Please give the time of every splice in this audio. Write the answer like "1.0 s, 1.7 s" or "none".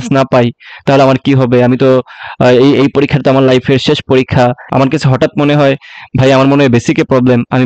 4.6 s

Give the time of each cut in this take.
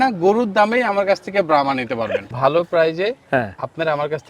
2.3 s

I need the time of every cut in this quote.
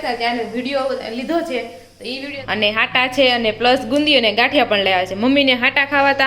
2.2 s

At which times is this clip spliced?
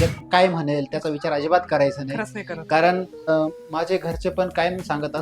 3.2 s

